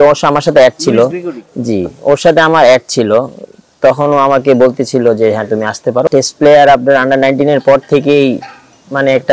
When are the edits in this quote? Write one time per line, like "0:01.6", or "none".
0:06.0